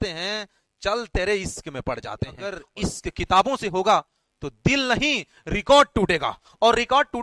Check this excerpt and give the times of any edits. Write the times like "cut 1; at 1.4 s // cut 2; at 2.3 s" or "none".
cut 1; at 2.7 s